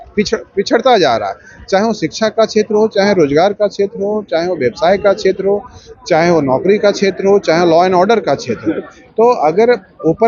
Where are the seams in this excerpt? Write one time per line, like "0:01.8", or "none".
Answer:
none